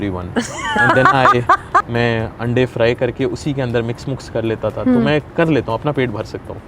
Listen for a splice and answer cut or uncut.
cut